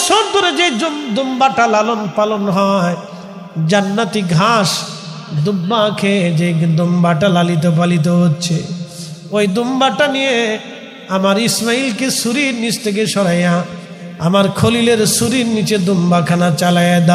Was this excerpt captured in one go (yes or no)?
yes